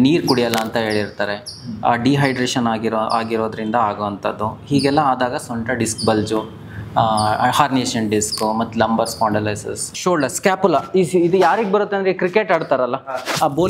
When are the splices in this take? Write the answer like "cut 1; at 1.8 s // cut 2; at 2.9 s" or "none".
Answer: cut 1; at 9.9 s

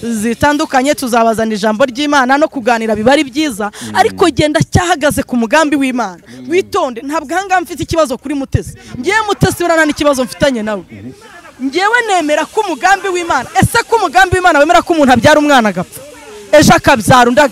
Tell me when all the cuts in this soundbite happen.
none

